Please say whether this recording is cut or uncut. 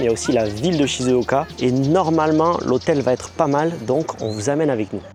uncut